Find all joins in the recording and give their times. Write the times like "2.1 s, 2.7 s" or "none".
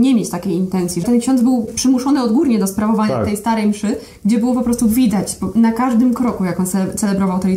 1.0 s, 1.7 s